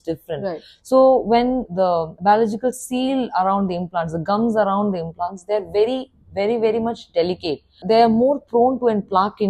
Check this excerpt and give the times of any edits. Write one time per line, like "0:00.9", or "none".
0:01.7
0:07.8